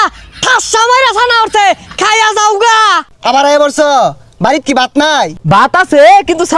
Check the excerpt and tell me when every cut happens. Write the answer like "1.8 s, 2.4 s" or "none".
3.1 s, 5.4 s